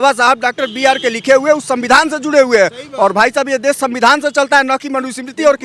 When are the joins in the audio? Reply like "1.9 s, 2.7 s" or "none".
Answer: none